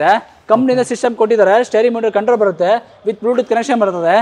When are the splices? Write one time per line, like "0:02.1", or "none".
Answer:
none